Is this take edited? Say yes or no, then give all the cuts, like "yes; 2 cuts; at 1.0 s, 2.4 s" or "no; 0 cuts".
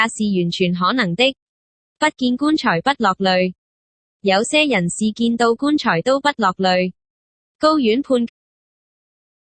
no; 0 cuts